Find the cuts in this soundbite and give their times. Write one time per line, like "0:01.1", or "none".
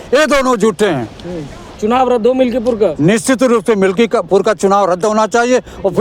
0:01.8